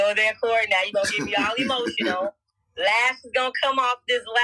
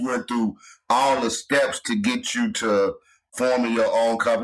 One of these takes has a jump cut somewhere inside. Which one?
second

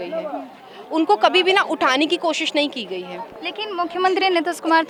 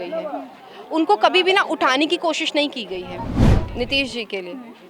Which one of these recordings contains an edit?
second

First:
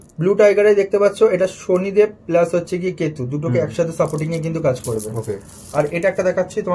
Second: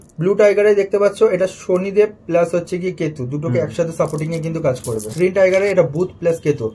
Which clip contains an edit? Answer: second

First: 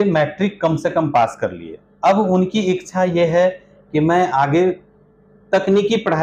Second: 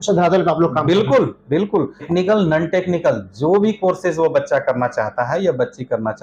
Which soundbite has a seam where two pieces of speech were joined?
second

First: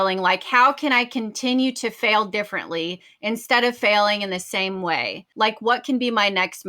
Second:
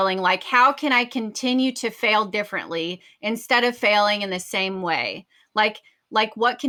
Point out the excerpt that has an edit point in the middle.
first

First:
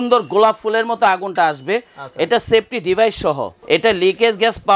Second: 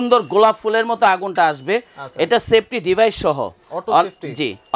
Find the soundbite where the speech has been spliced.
first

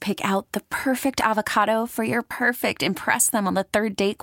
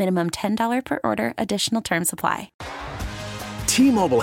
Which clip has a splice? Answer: second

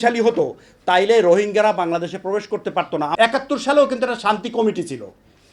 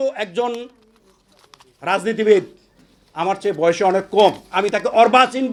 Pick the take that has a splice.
first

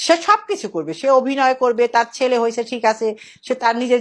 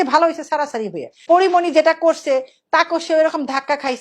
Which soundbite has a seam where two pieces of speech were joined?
second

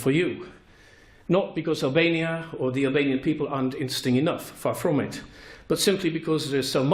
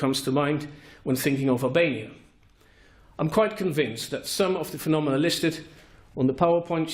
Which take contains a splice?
first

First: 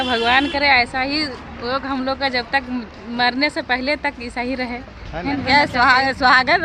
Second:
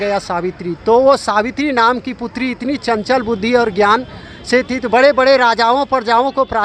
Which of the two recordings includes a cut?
first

